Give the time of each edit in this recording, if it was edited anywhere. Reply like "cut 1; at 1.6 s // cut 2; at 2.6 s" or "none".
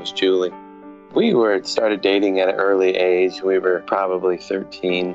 cut 1; at 1.0 s // cut 2; at 4.1 s

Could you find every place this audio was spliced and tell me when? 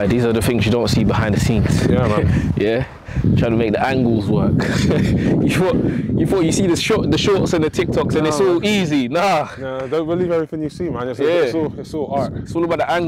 none

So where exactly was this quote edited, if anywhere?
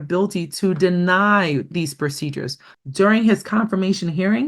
cut 1; at 2.6 s

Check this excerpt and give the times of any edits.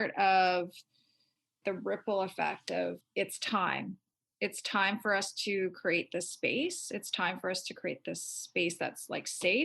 cut 1; at 1.5 s // cut 2; at 3.0 s

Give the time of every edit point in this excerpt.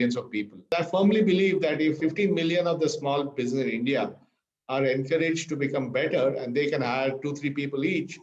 cut 1; at 0.7 s // cut 2; at 2.0 s

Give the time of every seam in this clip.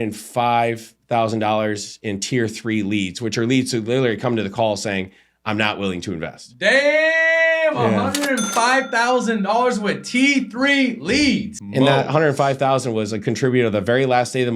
cut 1; at 11.6 s

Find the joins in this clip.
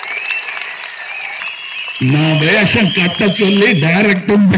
cut 1; at 1.4 s

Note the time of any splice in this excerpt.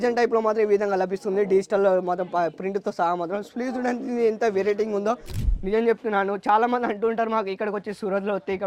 cut 1; at 5.3 s

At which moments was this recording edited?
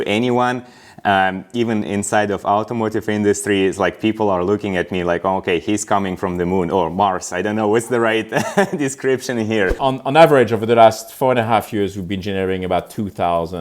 cut 1; at 9.8 s

